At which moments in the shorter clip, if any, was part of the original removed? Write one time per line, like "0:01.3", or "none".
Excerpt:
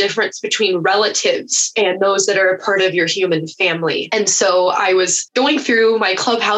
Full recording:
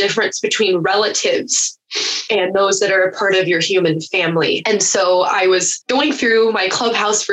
0:01.6